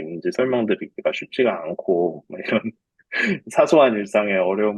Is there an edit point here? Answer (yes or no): no